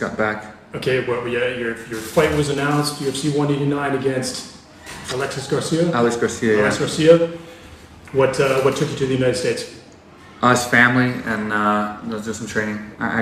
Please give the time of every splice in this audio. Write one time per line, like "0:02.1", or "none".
none